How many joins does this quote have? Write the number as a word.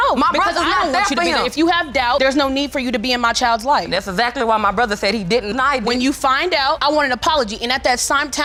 zero